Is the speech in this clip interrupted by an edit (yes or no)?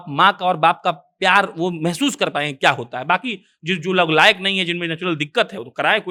no